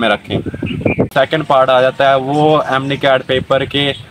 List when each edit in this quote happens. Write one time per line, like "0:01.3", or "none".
0:01.1